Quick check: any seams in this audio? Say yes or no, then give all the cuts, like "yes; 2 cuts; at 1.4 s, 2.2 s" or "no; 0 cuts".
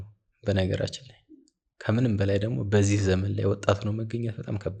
no; 0 cuts